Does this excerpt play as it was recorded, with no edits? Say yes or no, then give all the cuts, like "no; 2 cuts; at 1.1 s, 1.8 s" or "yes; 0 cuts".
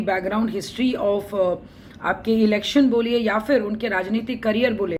yes; 0 cuts